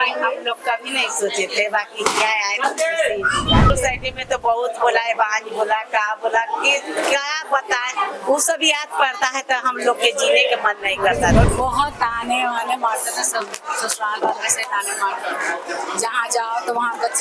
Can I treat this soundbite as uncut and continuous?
no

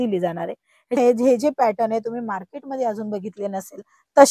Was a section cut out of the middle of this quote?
yes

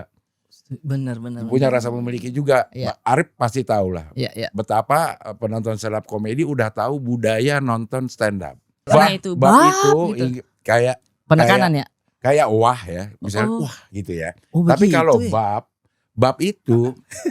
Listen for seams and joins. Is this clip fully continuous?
no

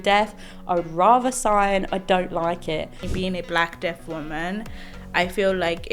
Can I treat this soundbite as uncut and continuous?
no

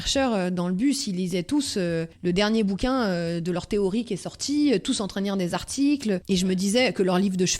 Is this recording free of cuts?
no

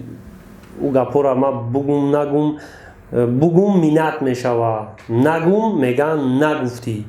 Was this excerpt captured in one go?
yes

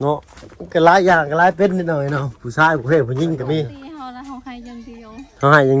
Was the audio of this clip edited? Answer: yes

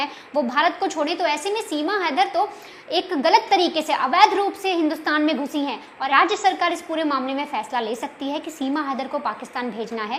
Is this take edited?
yes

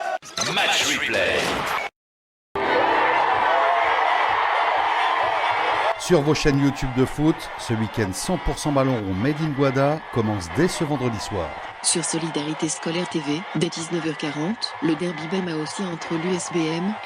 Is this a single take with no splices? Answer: no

